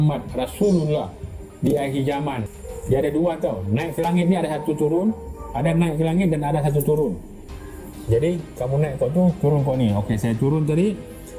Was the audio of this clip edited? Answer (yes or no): yes